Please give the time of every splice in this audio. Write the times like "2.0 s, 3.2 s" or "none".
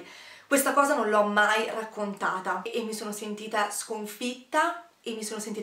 2.7 s